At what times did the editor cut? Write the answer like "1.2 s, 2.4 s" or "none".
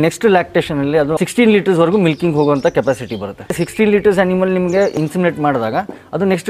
1.1 s, 3.6 s, 4.9 s